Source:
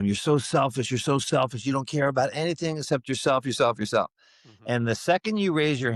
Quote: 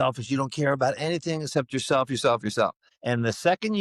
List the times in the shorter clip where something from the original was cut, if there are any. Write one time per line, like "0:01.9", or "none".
0:02.9